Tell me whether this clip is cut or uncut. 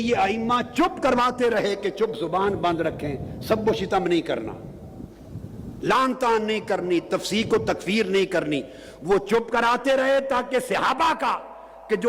uncut